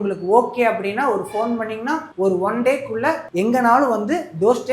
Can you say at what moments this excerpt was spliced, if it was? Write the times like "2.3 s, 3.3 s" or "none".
2.1 s, 3.2 s